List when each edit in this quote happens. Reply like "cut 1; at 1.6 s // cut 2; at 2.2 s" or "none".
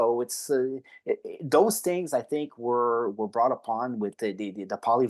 none